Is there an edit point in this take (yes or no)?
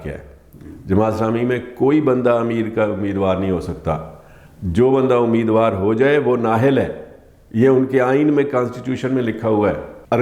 no